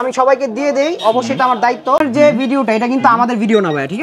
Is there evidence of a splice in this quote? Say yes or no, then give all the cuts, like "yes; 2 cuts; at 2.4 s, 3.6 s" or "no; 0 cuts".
yes; 1 cut; at 2.0 s